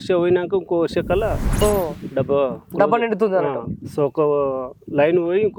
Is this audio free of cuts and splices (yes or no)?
yes